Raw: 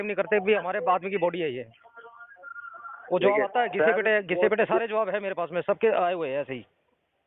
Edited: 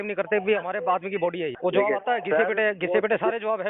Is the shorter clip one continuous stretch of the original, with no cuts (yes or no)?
no